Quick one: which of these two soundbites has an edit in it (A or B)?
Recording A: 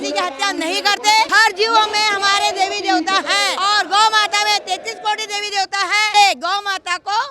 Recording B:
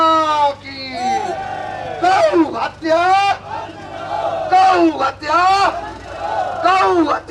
A